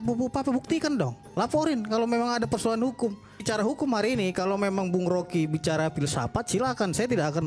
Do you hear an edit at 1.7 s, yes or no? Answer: no